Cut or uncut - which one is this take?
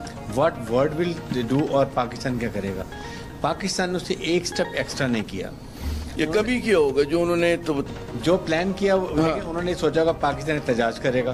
uncut